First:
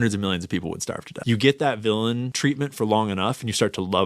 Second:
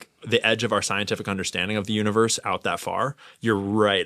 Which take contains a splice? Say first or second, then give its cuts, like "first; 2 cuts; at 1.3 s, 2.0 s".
first; 2 cuts; at 1.1 s, 2.3 s